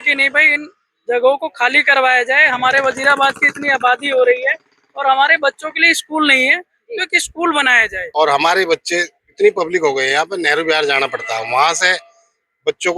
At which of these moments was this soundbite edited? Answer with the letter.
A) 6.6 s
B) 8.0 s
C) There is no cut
B